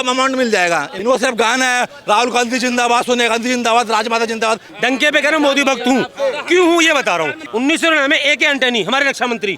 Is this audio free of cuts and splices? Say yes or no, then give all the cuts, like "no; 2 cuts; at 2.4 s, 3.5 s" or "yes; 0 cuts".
no; 3 cuts; at 0.9 s, 4.7 s, 7.4 s